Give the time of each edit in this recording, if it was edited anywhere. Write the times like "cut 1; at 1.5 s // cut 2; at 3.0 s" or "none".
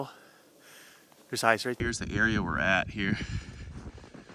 cut 1; at 1.8 s